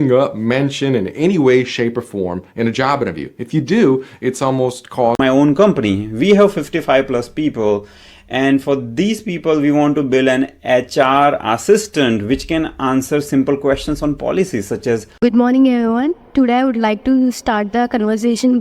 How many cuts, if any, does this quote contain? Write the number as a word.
two